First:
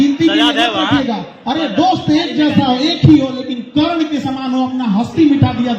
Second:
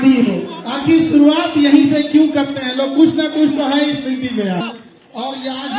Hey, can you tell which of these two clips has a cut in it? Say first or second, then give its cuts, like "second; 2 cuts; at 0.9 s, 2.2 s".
second; 1 cut; at 4.6 s